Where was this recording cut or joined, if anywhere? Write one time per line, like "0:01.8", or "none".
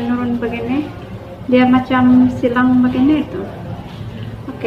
none